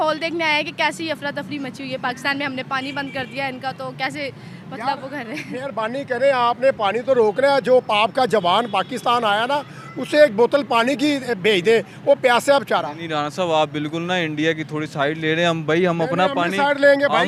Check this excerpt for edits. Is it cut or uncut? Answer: uncut